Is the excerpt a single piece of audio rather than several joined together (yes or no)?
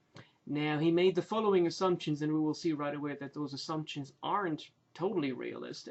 yes